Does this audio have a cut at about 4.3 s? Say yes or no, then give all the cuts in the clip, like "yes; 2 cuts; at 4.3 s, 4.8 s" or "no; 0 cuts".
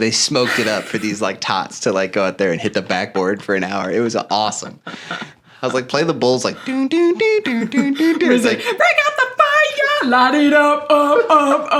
no; 0 cuts